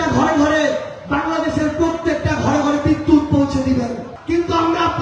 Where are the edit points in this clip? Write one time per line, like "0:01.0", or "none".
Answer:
0:04.1